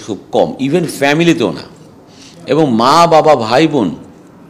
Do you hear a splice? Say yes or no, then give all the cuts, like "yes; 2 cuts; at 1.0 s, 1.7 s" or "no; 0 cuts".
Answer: no; 0 cuts